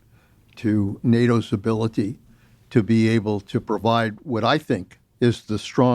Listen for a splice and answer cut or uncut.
cut